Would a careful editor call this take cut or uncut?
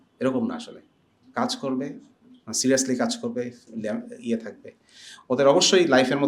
uncut